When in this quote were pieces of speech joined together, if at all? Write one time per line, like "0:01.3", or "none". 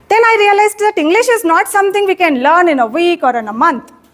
none